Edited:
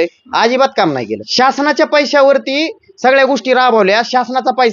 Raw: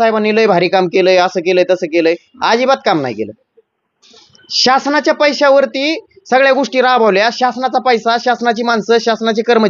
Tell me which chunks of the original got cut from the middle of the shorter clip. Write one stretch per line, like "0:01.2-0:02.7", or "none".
0:03.3-0:04.5